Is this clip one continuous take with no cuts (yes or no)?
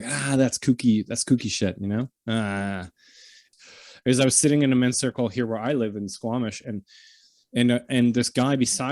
no